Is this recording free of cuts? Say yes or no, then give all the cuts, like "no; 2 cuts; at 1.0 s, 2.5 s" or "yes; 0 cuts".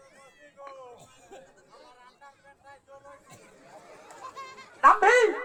yes; 0 cuts